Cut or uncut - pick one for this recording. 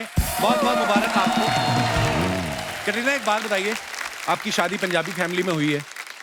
uncut